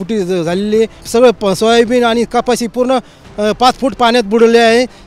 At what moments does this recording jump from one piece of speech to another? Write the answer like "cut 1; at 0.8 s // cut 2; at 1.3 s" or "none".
cut 1; at 1.0 s